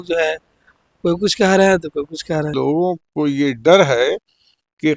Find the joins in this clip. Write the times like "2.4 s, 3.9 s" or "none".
2.5 s